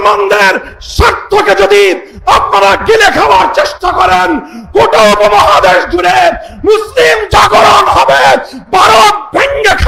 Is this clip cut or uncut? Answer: uncut